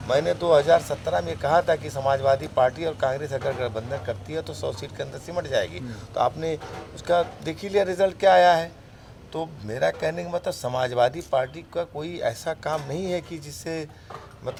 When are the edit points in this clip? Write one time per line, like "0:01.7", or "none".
none